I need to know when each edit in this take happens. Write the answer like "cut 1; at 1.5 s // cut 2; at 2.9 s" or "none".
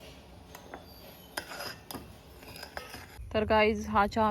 cut 1; at 3.2 s